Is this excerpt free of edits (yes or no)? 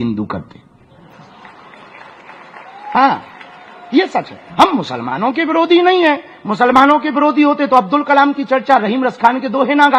yes